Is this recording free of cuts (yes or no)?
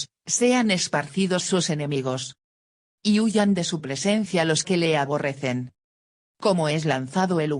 no